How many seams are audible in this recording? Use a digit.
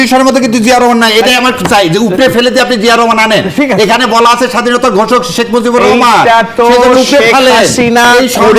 0